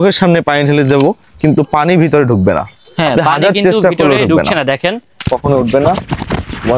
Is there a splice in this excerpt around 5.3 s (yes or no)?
yes